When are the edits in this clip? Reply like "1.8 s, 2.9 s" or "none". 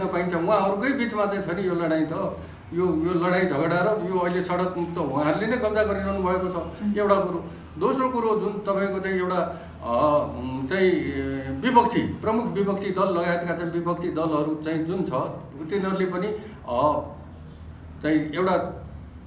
none